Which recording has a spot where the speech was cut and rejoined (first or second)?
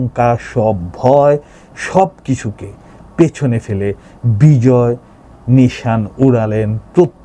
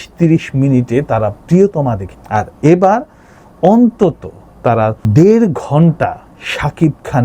second